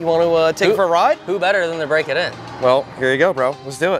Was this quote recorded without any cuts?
yes; 0 cuts

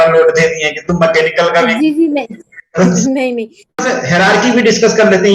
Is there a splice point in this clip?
yes; 1 cut; at 3.7 s

